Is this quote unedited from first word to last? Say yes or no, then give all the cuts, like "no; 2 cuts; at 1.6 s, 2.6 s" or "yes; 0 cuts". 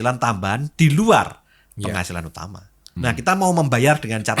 no; 1 cut; at 3.0 s